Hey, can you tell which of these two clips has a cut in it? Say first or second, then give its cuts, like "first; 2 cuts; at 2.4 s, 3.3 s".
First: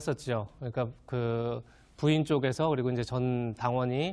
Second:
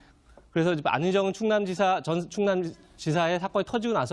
first; 1 cut; at 2.4 s